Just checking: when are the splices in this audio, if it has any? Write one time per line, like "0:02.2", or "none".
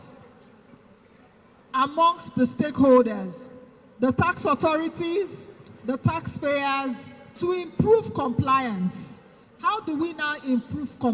0:07.4